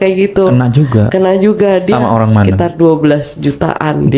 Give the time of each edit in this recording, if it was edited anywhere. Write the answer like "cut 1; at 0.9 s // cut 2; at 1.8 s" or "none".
none